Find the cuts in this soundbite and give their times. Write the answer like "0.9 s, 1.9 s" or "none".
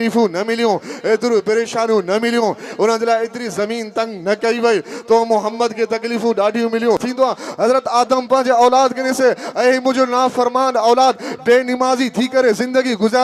7.1 s